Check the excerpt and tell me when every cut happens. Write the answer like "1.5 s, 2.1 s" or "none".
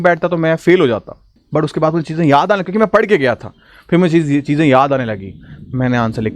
1.4 s